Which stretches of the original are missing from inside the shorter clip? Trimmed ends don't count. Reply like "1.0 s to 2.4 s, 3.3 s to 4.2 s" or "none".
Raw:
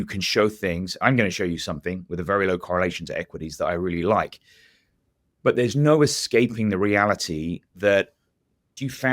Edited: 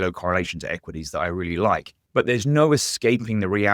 4.4 s to 5.2 s